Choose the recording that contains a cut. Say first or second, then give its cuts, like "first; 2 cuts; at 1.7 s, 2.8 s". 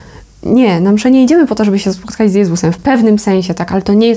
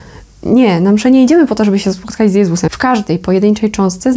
second; 1 cut; at 2.7 s